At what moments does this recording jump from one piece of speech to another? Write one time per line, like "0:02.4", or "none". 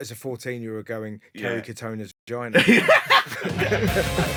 none